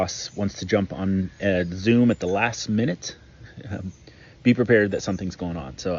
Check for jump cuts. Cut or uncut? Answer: cut